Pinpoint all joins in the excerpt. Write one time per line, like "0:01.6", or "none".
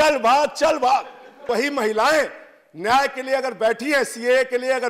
0:01.4